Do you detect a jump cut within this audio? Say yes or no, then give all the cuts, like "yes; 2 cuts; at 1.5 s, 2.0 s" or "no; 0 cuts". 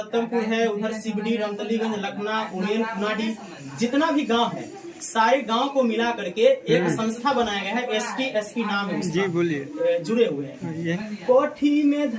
yes; 2 cuts; at 9.7 s, 11.0 s